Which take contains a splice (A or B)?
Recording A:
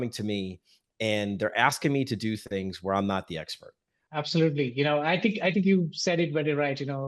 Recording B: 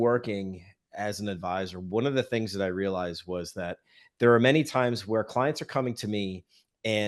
A